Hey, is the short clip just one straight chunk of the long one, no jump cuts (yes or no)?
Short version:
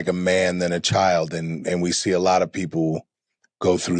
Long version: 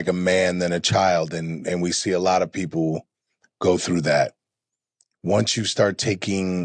yes